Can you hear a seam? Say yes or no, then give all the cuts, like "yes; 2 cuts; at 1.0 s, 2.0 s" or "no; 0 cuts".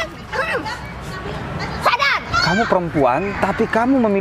yes; 2 cuts; at 2.3 s, 3.3 s